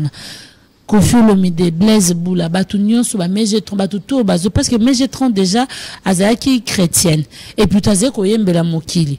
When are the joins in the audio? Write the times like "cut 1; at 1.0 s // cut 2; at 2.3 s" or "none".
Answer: none